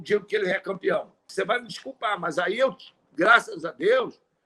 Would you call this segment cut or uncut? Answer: cut